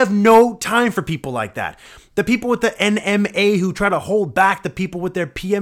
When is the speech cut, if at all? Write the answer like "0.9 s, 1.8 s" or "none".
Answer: none